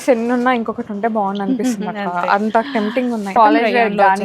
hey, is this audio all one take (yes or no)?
no